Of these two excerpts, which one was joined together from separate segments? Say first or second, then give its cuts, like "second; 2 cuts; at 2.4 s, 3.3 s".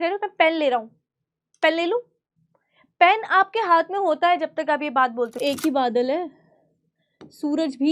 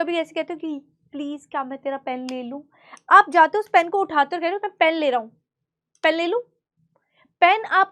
first; 1 cut; at 5.4 s